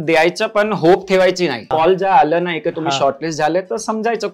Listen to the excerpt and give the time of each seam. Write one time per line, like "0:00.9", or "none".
0:01.7